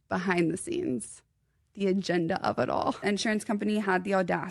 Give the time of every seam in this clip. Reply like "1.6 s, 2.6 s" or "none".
3.0 s